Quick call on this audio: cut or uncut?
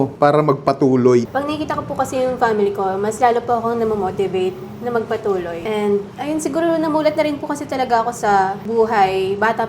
cut